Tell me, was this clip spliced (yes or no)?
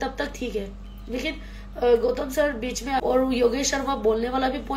yes